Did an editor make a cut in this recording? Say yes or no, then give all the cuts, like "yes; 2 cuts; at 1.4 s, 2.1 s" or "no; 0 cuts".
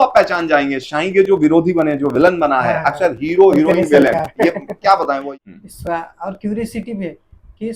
yes; 1 cut; at 5.2 s